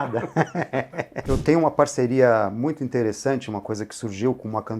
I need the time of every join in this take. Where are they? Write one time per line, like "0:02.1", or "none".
0:01.2